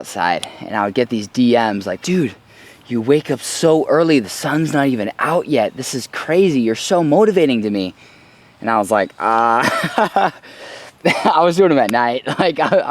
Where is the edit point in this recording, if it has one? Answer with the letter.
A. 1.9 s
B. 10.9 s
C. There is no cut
A